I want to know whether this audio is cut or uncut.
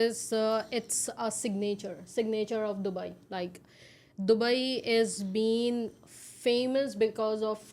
uncut